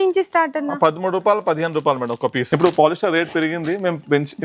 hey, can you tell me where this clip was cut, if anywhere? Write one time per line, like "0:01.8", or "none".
0:02.4